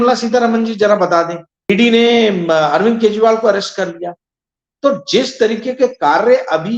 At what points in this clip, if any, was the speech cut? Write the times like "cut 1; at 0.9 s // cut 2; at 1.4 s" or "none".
cut 1; at 1.7 s